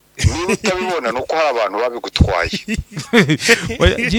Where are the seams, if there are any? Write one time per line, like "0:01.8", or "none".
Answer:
none